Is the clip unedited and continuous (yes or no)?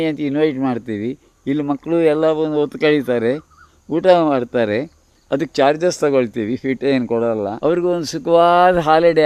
no